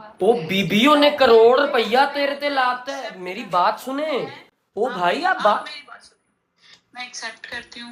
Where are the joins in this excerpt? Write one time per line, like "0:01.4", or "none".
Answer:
none